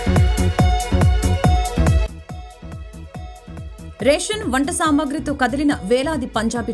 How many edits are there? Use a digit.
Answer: 1